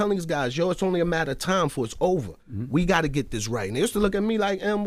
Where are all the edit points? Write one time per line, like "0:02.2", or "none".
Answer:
none